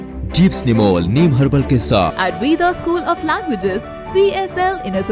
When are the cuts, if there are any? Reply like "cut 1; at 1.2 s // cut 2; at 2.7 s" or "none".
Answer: cut 1; at 2.1 s